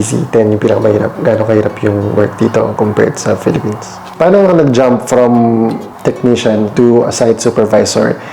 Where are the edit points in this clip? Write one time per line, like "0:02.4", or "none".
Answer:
0:02.7
0:04.1